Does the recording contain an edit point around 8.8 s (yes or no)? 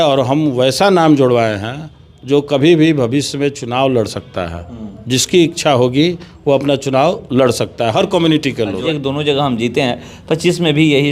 yes